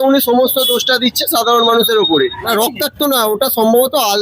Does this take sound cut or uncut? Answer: cut